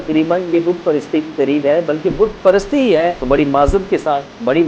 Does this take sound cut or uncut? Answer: cut